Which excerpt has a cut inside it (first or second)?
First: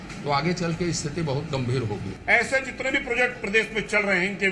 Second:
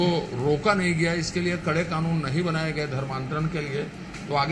first